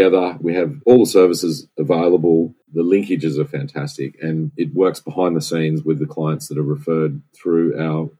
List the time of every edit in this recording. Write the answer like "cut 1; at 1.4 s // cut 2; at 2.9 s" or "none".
cut 1; at 2.6 s

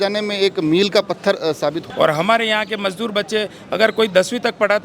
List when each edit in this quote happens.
cut 1; at 1.8 s

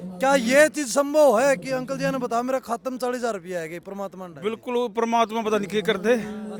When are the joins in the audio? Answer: none

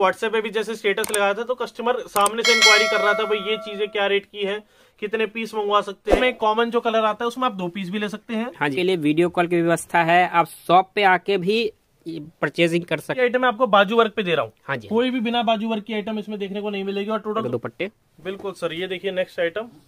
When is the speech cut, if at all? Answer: cut 1; at 6.2 s // cut 2; at 8.7 s // cut 3; at 13.2 s // cut 4; at 17.4 s

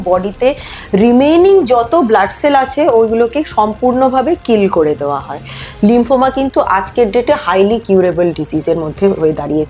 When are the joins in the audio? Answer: cut 1; at 5.6 s

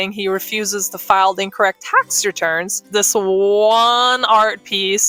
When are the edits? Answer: cut 1; at 2.7 s

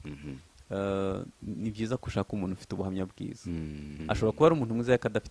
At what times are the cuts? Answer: cut 1; at 3.9 s

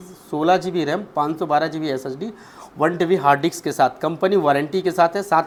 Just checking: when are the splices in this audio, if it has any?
none

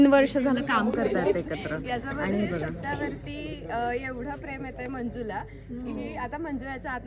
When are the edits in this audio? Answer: cut 1; at 2.9 s

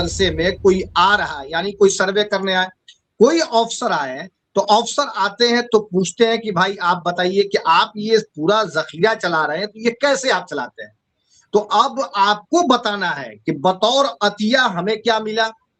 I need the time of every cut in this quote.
none

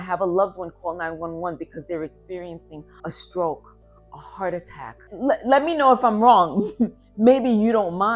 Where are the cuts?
cut 1; at 3.1 s // cut 2; at 5.1 s

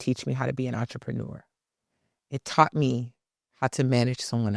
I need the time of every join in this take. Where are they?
none

